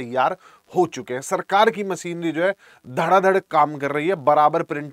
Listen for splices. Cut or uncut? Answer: uncut